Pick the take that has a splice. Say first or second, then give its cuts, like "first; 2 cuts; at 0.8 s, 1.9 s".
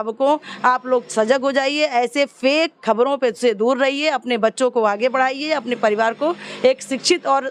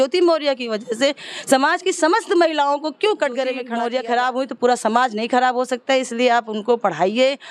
second; 1 cut; at 3.6 s